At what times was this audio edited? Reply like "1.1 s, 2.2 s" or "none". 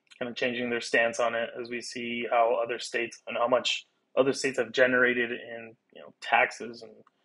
none